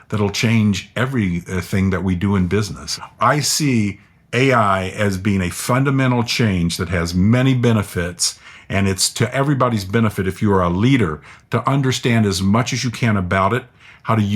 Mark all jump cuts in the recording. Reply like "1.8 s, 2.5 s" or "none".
2.8 s